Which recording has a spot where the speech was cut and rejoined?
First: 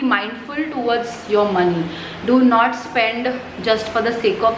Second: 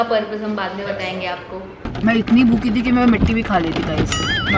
second; 1 cut; at 1.8 s

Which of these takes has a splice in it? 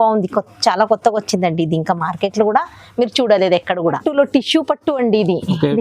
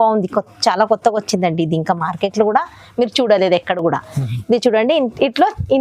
first; 1 cut; at 3.8 s

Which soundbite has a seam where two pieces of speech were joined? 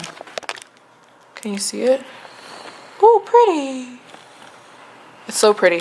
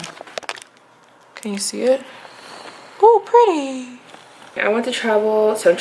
second; 1 cut; at 4.6 s

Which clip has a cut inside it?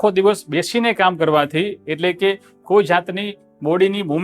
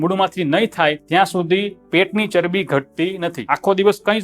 second; 2 cuts; at 1.0 s, 3.4 s

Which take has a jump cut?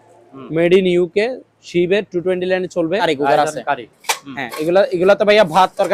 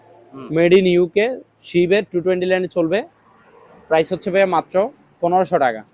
first; 1 cut; at 3.0 s

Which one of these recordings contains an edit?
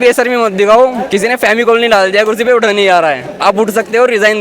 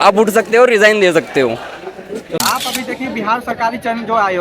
second; 1 cut; at 2.4 s

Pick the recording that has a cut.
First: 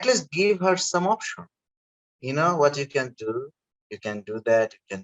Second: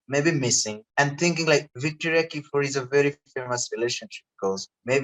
second; 2 cuts; at 0.8 s, 1.7 s

